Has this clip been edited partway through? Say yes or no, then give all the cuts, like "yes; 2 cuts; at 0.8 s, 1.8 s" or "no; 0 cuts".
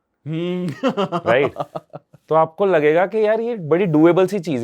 no; 0 cuts